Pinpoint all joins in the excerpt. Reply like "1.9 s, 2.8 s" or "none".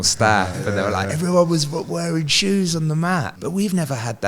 3.4 s